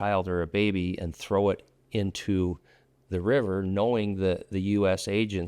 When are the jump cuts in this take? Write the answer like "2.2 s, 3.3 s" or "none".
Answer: none

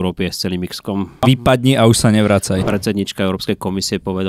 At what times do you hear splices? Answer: 1.2 s, 2.6 s

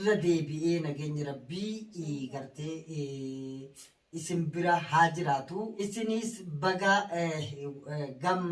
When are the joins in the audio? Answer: 5.8 s

